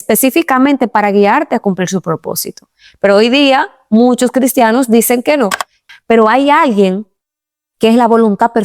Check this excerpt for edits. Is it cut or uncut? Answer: cut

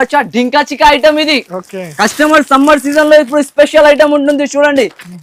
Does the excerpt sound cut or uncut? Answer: uncut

